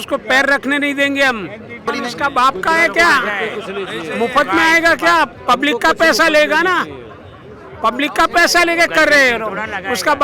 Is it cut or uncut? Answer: cut